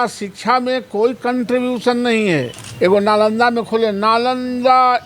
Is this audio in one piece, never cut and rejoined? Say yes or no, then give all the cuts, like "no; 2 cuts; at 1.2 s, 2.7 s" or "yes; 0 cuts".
no; 1 cut; at 2.6 s